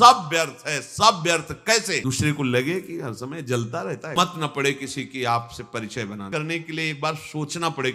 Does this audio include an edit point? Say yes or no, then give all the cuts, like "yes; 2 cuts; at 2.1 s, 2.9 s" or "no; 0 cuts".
yes; 3 cuts; at 2.0 s, 4.1 s, 6.2 s